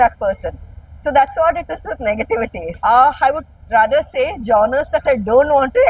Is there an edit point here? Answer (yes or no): yes